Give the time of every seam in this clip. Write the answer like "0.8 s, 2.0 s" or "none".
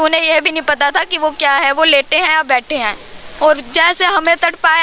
3.2 s